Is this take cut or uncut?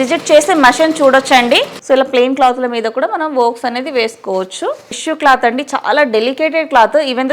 cut